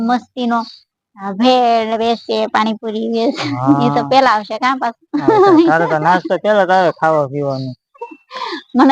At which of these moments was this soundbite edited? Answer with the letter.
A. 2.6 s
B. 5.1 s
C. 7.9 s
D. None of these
C